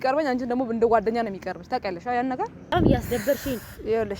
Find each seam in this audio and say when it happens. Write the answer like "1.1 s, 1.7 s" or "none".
2.7 s